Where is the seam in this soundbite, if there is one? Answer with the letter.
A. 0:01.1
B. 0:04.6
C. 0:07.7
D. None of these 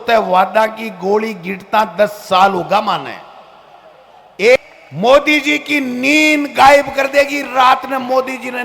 B